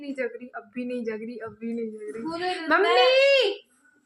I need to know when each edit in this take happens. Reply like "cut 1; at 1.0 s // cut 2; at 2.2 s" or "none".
none